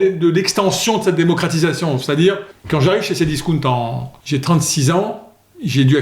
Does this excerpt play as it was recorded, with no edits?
no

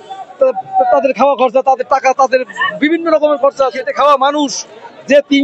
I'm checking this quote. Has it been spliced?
yes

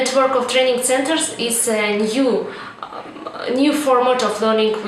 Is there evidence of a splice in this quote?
no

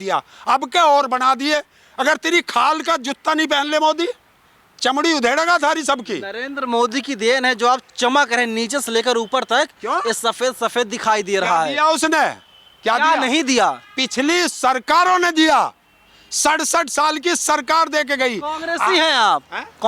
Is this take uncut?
yes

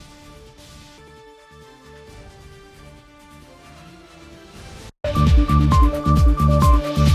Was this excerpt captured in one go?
no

